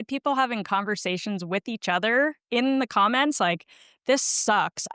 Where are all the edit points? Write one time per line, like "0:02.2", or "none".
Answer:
none